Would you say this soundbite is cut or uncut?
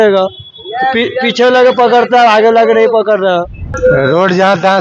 cut